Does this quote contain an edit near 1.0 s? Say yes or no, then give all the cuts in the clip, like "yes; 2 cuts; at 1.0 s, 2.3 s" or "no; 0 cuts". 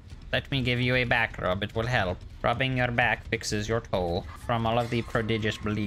no; 2 cuts; at 2.3 s, 4.3 s